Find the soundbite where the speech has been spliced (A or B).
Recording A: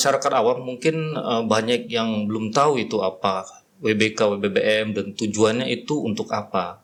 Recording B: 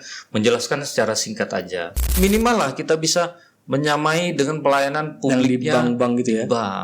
B